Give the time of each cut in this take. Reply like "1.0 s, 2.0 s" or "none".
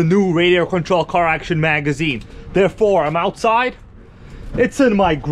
none